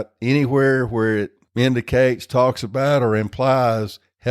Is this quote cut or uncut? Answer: cut